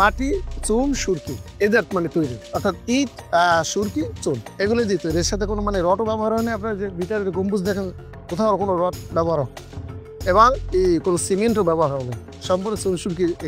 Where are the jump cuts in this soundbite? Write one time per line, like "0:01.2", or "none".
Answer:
none